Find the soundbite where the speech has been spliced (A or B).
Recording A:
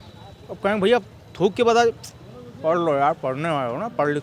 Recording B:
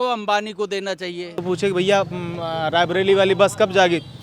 B